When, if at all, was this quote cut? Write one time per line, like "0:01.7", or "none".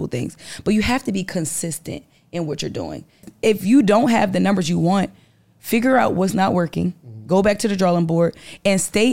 0:03.3

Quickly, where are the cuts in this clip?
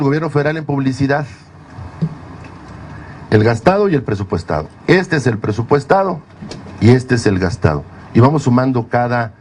none

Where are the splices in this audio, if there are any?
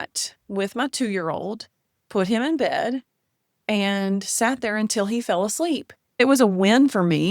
0:06.2

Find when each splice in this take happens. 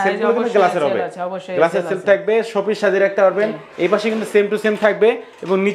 none

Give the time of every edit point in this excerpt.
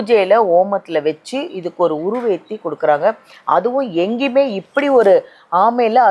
none

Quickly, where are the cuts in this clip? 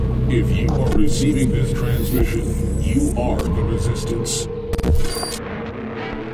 none

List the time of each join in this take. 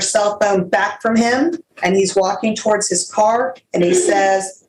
0:01.7

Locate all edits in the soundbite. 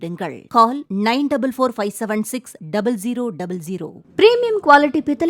0:03.9

